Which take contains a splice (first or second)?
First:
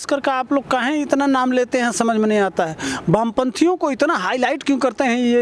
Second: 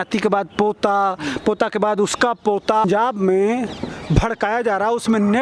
second